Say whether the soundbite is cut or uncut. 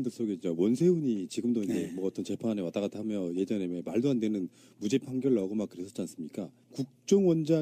uncut